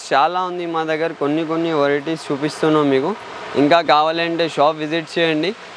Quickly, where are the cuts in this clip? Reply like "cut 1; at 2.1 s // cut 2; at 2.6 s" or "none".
none